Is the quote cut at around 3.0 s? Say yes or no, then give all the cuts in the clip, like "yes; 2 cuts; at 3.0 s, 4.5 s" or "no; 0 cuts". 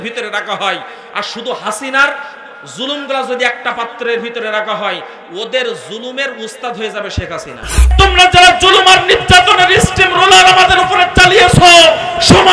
no; 1 cut; at 7.8 s